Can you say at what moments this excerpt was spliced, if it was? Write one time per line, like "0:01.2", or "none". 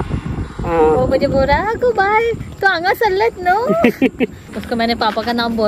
0:04.5

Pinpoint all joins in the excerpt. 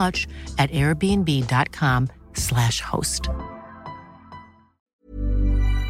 0:04.9

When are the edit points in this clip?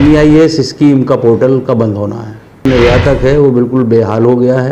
0:02.6

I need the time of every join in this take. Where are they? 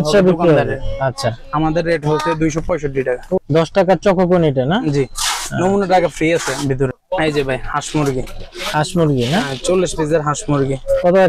0:03.4
0:07.0

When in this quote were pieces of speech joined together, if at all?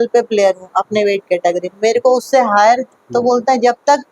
0:02.9

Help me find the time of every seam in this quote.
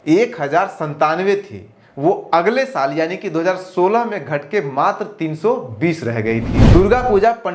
0:06.5

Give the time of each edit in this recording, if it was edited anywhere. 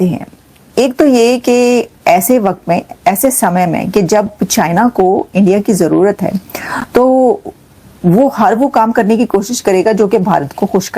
none

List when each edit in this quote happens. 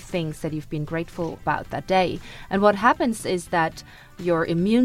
0:01.4

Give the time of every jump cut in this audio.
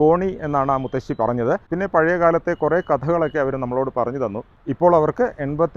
0:04.6

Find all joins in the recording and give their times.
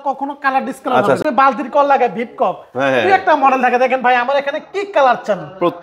0:01.2

